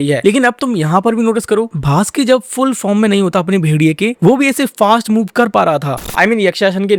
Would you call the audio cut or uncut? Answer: cut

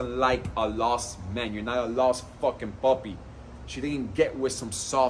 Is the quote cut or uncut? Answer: uncut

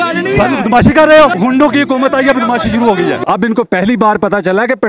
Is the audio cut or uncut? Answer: cut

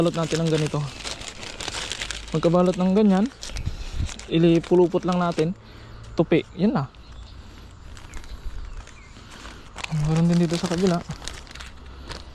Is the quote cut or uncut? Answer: uncut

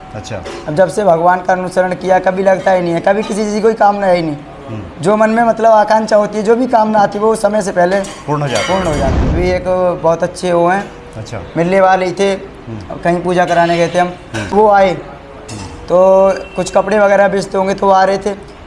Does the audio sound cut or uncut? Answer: cut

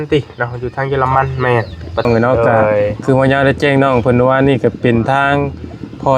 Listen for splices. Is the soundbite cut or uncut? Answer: cut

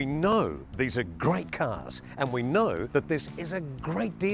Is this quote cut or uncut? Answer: cut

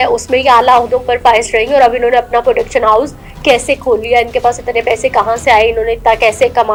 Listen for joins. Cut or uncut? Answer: uncut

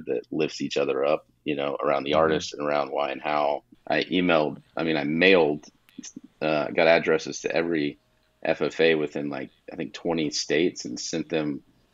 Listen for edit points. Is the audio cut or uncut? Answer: cut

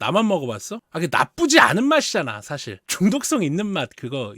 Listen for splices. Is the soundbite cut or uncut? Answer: cut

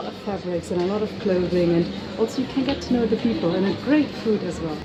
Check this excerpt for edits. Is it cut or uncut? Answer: uncut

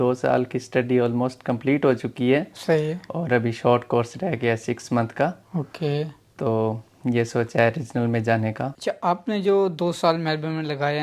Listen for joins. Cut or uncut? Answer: uncut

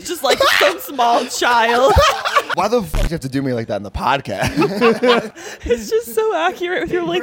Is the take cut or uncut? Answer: cut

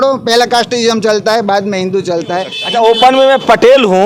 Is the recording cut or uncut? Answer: cut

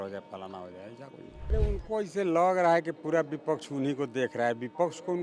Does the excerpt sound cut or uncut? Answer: cut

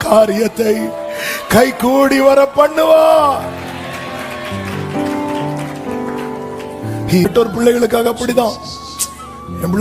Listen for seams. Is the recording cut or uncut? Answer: cut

